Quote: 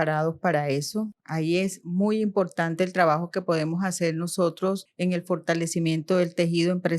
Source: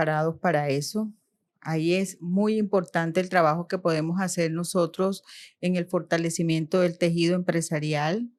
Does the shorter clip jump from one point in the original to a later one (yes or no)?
yes